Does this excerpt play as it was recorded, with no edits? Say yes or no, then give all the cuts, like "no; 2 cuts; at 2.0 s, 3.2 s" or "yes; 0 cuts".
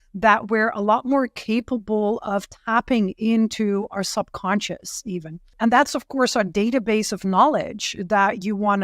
no; 1 cut; at 5.5 s